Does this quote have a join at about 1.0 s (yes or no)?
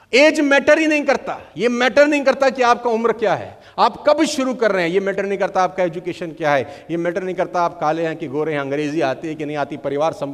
no